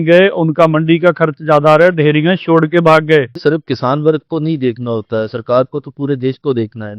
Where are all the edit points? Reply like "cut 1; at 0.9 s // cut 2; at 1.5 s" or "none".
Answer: cut 1; at 3.4 s